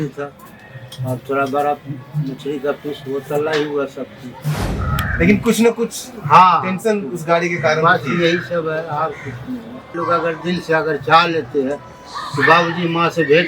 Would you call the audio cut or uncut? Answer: cut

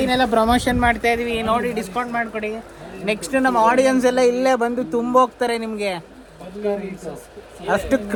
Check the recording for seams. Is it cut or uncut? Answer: uncut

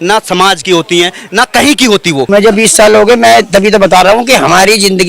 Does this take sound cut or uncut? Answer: cut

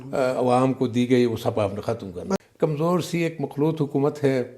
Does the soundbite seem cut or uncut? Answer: cut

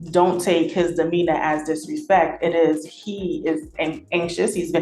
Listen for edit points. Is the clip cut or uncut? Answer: uncut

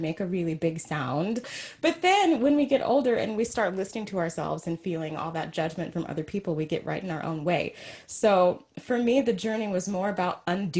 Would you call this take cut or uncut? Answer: cut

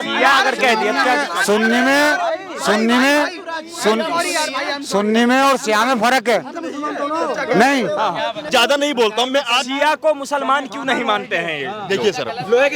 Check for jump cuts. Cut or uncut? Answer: cut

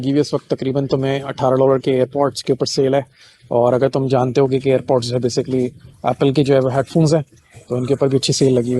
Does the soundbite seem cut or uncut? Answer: uncut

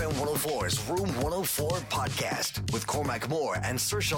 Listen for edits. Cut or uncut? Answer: uncut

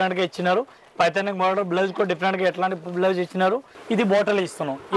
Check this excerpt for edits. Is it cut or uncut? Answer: cut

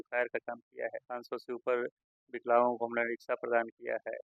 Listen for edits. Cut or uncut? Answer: cut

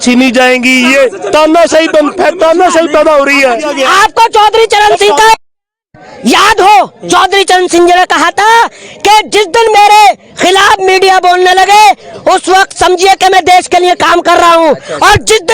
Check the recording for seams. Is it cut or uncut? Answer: cut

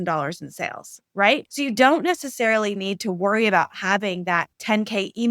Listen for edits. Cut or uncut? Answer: cut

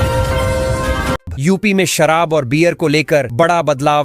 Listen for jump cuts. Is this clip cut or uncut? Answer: cut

